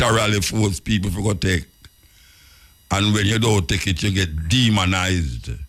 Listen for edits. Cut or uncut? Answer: uncut